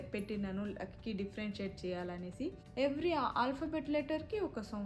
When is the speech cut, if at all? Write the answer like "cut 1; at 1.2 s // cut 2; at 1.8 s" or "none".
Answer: cut 1; at 2.6 s